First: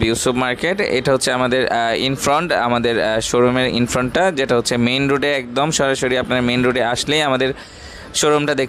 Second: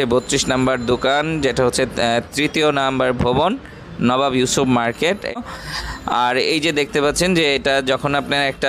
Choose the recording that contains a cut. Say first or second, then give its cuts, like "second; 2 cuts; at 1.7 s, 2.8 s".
second; 1 cut; at 5.4 s